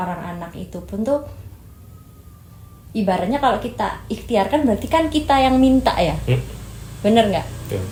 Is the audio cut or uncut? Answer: uncut